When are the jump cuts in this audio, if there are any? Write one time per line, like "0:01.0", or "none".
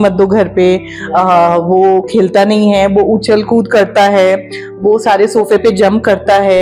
none